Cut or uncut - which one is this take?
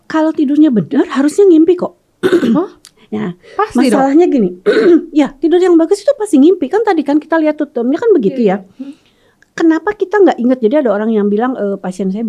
uncut